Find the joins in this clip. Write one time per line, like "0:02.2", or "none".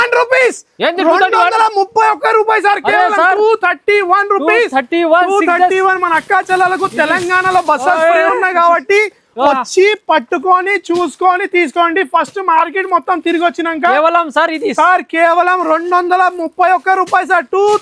none